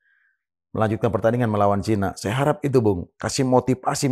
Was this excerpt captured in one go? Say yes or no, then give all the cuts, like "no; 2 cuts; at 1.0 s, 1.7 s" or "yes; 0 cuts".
yes; 0 cuts